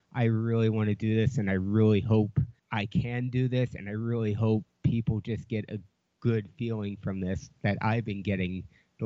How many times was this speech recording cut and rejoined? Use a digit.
1